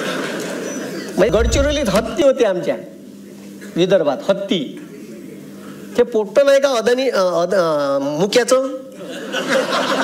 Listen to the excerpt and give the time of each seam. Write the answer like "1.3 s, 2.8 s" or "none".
1.3 s